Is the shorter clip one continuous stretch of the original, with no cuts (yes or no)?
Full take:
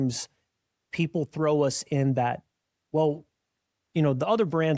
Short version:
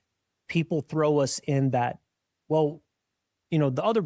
yes